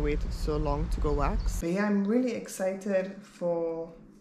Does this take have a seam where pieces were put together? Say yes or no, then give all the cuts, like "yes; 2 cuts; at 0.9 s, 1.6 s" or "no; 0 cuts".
yes; 1 cut; at 1.6 s